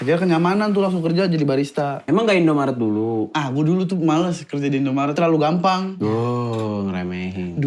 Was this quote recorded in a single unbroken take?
no; 4 cuts; at 2.0 s, 3.3 s, 5.2 s, 5.9 s

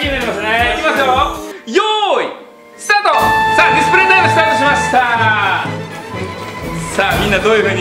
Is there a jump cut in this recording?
no; 0 cuts

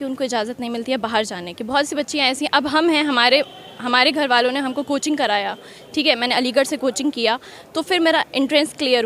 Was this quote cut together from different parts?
no; 0 cuts

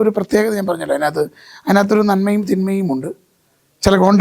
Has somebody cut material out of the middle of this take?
no; 0 cuts

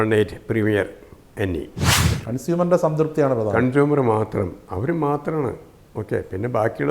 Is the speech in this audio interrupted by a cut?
yes; 1 cut; at 2.0 s

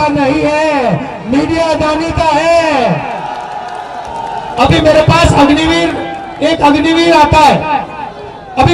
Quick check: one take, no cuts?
no; 1 cut; at 4.1 s

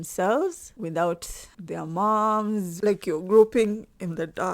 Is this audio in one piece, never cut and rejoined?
no; 1 cut; at 2.7 s

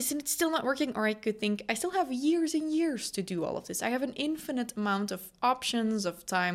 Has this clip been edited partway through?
no; 0 cuts

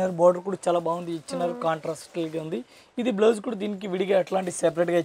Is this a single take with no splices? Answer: yes; 0 cuts

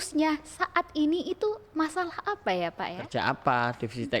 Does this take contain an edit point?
yes; 1 cut; at 3.0 s

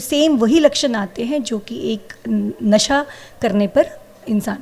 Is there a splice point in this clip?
no; 0 cuts

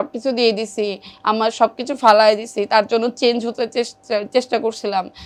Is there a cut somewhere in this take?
no; 0 cuts

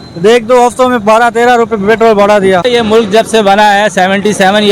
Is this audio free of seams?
no; 1 cut; at 2.6 s

